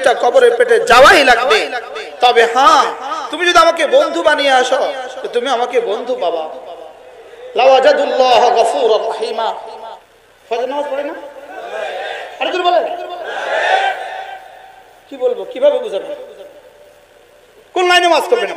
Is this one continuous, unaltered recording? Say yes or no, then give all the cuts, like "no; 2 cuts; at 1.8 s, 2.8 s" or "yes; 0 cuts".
no; 1 cut; at 9.8 s